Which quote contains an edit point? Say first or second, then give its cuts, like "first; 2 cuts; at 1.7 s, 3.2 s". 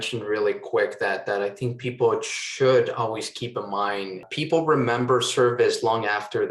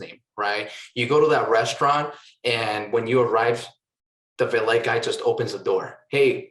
first; 1 cut; at 4.2 s